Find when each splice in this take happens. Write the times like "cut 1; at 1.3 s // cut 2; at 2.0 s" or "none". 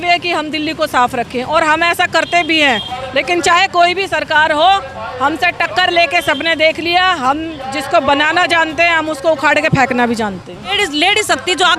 cut 1; at 10.7 s